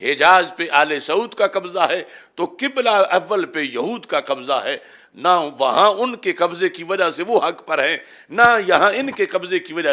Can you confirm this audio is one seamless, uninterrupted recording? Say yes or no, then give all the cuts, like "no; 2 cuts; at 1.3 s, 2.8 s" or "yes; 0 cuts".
yes; 0 cuts